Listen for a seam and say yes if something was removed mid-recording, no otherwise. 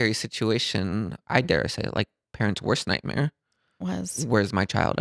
yes